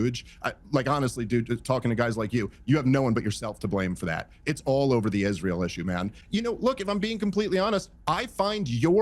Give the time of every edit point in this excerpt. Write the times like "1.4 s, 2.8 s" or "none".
6.2 s